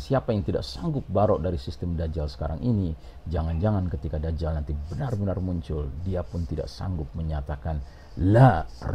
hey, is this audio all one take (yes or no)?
yes